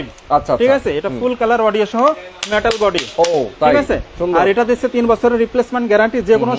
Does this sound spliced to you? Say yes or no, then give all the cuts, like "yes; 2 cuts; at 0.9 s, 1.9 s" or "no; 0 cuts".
no; 0 cuts